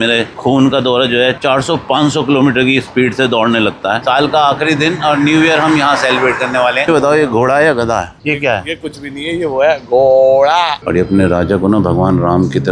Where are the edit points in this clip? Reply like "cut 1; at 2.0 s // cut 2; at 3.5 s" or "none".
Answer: cut 1; at 4.0 s // cut 2; at 6.9 s // cut 3; at 10.8 s